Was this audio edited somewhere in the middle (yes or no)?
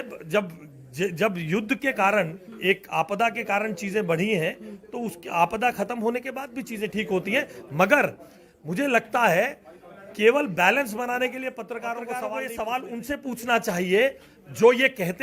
yes